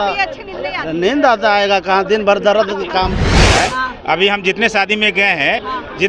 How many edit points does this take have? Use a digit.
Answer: 1